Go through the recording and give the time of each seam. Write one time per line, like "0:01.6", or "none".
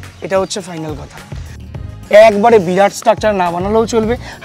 0:01.6

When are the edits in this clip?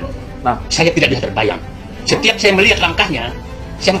none

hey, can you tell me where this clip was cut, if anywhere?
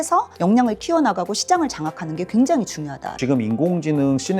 0:03.2

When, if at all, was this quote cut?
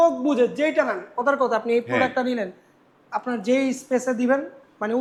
none

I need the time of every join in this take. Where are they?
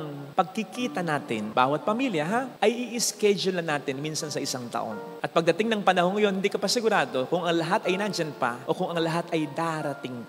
none

